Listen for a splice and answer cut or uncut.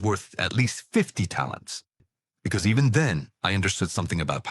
cut